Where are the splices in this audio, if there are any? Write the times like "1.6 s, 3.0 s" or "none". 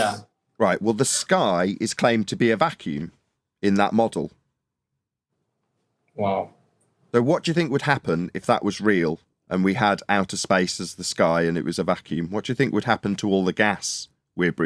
none